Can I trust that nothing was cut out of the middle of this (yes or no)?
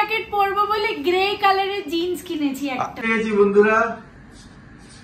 no